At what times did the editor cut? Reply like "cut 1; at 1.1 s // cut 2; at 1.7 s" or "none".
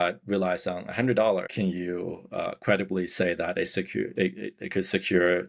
cut 1; at 1.5 s

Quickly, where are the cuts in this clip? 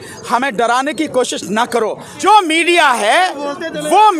cut 1; at 2.1 s

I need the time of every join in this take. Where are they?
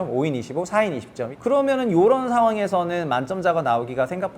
cut 1; at 1.2 s

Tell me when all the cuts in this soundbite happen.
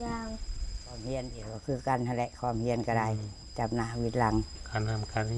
cut 1; at 1.0 s

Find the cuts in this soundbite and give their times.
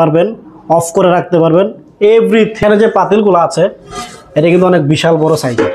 cut 1; at 2.6 s

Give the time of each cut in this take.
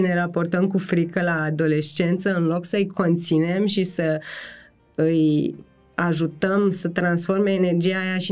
none

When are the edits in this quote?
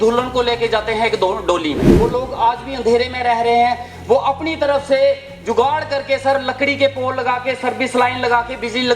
cut 1; at 1.9 s

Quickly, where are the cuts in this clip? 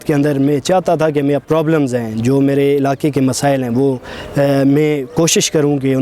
cut 1; at 1.4 s

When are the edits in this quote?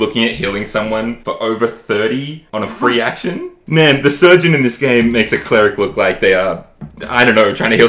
cut 1; at 1.2 s // cut 2; at 2.4 s // cut 3; at 3.6 s

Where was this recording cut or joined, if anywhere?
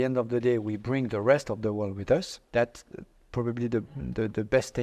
cut 1; at 2.4 s

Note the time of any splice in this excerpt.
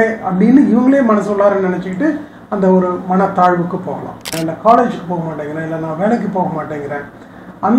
cut 1; at 4.3 s

